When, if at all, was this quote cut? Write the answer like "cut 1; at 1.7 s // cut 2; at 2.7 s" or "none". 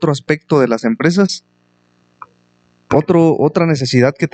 none